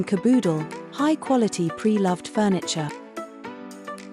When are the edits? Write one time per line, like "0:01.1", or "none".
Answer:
0:02.9